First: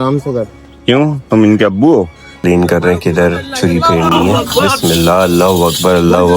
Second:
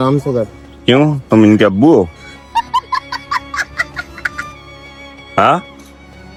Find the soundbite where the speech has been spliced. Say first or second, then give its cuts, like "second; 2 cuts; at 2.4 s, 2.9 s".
first; 1 cut; at 2.3 s